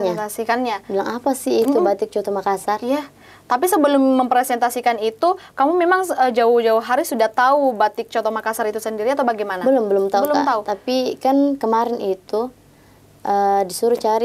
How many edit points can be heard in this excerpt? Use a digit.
0